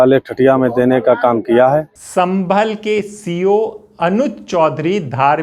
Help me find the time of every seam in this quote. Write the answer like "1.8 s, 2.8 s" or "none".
2.0 s